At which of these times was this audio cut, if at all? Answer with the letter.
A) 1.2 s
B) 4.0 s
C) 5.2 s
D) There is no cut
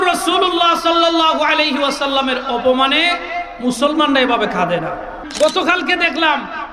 C